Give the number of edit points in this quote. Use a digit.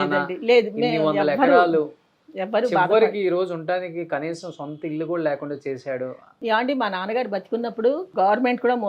2